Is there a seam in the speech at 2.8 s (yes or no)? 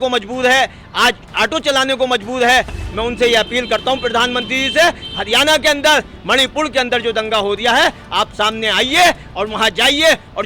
yes